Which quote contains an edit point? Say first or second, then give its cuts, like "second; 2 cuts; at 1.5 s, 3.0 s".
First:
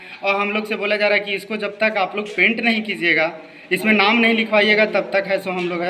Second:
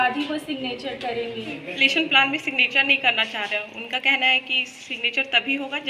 second; 1 cut; at 1.6 s